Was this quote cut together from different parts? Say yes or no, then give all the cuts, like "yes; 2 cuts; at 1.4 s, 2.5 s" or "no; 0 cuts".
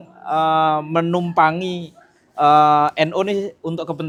no; 0 cuts